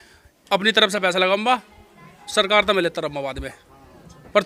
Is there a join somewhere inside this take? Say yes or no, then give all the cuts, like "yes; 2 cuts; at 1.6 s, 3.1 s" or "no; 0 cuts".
no; 0 cuts